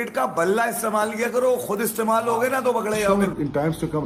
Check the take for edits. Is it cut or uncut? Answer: cut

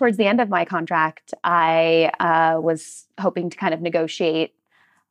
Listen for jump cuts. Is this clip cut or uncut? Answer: uncut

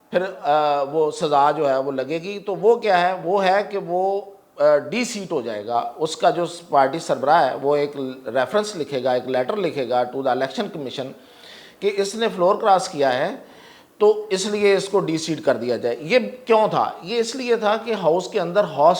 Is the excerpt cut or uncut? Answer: uncut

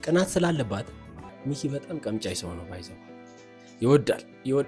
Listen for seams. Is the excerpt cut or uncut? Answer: cut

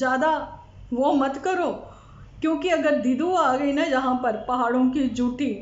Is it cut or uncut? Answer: uncut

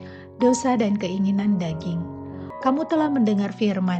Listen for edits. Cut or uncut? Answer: uncut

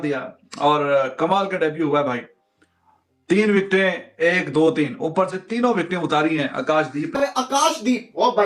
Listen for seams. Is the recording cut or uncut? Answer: cut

